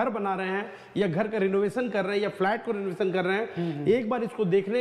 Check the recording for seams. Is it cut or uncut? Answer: uncut